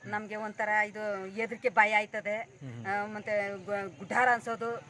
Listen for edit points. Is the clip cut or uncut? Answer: uncut